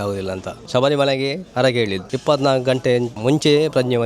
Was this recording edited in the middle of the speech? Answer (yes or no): yes